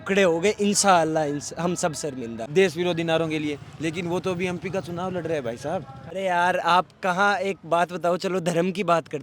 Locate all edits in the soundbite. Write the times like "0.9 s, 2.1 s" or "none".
2.4 s, 6.0 s